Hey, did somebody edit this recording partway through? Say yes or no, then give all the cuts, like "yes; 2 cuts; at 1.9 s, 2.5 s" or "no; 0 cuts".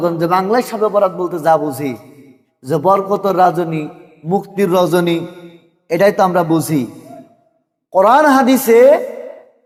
no; 0 cuts